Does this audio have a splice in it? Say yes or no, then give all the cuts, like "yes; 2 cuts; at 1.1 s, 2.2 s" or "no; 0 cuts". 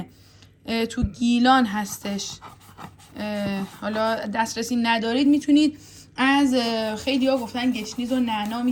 no; 0 cuts